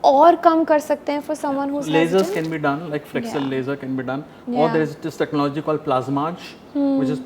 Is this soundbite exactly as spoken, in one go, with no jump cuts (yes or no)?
yes